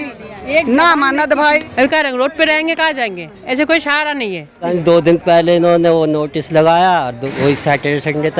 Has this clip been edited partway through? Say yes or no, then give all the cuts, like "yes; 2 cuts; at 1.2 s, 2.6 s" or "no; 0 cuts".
yes; 2 cuts; at 1.7 s, 4.7 s